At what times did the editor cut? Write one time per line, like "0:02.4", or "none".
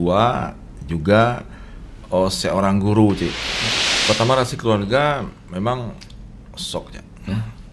0:03.5